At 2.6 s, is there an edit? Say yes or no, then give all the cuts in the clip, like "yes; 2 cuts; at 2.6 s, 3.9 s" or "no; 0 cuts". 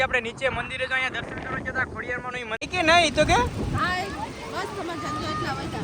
yes; 1 cut; at 2.6 s